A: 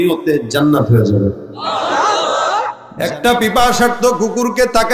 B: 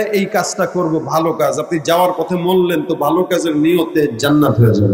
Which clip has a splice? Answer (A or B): A